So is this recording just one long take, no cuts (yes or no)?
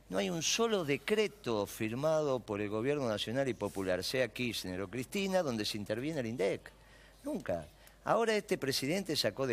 no